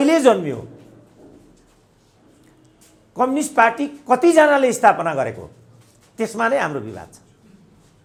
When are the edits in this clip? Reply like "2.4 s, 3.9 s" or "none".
none